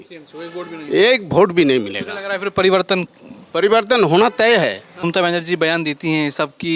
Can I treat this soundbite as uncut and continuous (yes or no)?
no